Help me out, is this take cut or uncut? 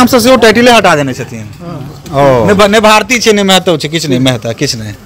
uncut